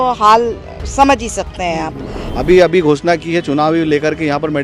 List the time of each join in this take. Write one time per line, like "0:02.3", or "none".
0:02.2